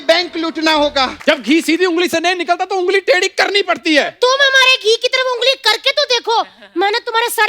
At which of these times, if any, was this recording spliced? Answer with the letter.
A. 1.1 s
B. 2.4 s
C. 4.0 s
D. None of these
A